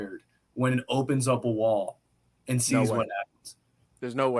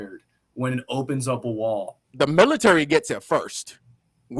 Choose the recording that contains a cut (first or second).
second